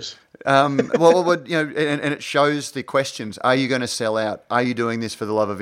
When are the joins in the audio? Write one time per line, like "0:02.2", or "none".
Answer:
none